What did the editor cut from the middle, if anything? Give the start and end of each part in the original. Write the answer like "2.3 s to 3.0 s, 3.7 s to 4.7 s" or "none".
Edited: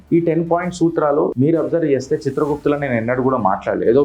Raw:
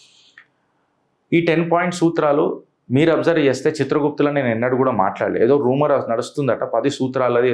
2.5 s to 2.9 s